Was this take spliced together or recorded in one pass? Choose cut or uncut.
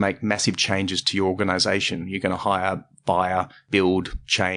cut